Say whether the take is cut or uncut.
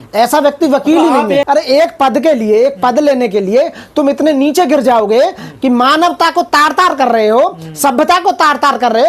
cut